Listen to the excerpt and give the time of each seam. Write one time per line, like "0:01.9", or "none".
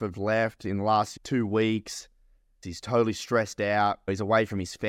0:01.1
0:02.6
0:04.1